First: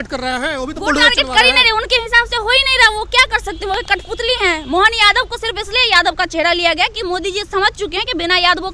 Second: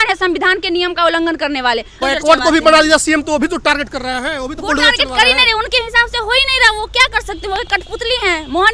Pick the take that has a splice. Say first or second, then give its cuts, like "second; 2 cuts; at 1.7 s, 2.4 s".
second; 1 cut; at 1.9 s